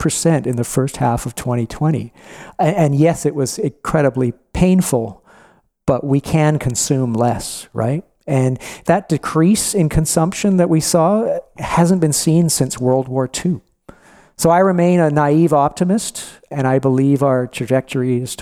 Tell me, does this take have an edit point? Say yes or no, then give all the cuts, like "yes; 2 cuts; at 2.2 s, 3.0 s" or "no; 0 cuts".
yes; 2 cuts; at 8.8 s, 16.4 s